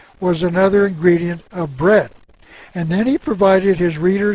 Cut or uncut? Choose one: cut